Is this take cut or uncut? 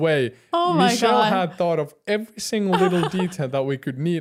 uncut